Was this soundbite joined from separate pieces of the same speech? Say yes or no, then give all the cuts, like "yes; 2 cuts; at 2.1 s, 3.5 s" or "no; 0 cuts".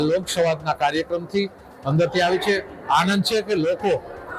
no; 0 cuts